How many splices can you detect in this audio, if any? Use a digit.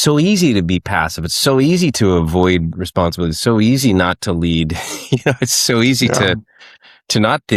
0